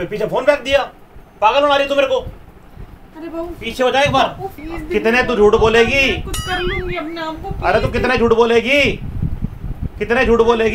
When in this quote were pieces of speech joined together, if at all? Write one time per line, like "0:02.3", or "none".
0:04.5